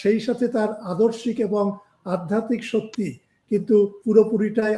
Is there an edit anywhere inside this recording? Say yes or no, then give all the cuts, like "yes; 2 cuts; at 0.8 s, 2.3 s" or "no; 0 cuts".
no; 0 cuts